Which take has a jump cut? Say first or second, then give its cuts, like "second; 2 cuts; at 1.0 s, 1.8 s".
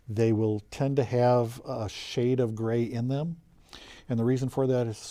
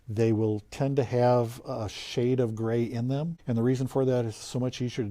second; 1 cut; at 3.3 s